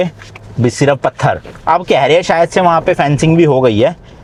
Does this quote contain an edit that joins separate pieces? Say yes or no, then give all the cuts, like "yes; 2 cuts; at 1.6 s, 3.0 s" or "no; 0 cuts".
no; 0 cuts